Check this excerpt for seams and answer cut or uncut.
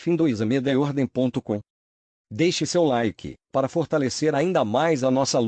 cut